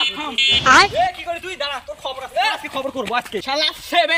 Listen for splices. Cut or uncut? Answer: uncut